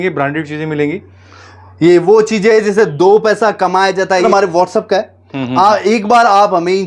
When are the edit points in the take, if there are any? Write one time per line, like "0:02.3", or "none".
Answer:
0:04.2